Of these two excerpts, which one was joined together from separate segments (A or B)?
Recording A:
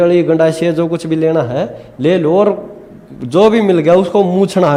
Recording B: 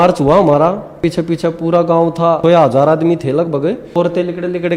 B